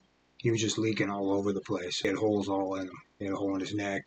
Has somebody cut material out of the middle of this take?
yes; 1 cut; at 2.0 s

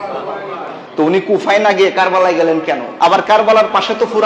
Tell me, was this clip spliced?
yes; 1 cut; at 2.9 s

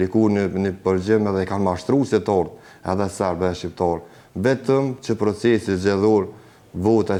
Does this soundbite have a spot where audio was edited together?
no; 0 cuts

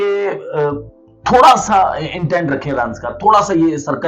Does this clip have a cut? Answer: no; 0 cuts

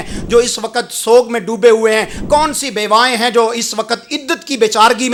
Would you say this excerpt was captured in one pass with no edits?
yes; 0 cuts

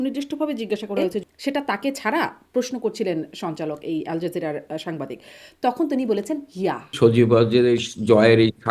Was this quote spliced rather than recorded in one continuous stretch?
yes; 2 cuts; at 1.2 s, 6.9 s

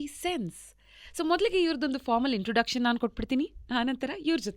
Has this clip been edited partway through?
no; 0 cuts

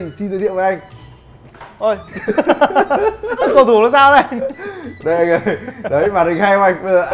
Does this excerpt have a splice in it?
no; 0 cuts

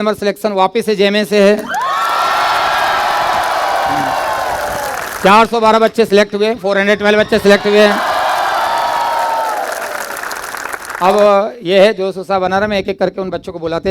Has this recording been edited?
no; 0 cuts

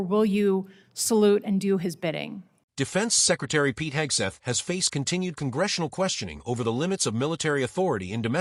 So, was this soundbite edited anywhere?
no; 0 cuts

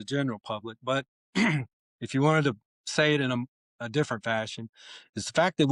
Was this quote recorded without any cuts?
yes; 0 cuts

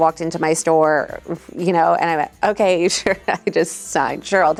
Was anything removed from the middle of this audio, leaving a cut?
no; 0 cuts

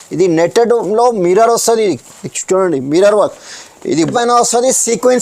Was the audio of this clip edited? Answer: yes; 1 cut; at 4.1 s

